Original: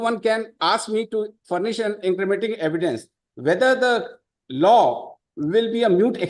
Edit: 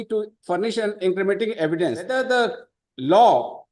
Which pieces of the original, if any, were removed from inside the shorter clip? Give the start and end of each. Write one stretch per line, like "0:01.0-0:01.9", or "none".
0:03.1-0:03.6